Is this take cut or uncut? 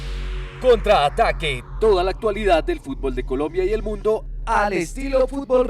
uncut